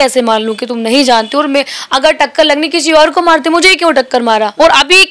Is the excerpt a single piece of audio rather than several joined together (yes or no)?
yes